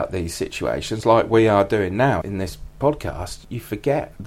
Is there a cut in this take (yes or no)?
no